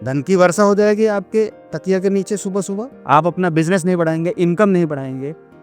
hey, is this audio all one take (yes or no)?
no